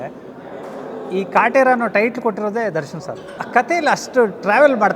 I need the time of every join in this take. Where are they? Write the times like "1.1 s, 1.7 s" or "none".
3.3 s